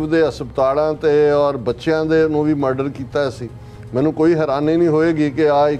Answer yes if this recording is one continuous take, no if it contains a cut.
yes